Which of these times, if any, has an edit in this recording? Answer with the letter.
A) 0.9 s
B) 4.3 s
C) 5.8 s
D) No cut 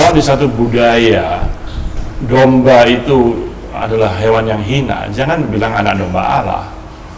D